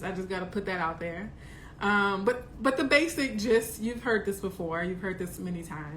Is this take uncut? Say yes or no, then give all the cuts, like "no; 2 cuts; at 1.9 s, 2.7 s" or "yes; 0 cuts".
yes; 0 cuts